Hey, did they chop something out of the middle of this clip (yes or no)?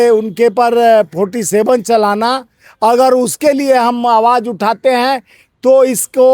no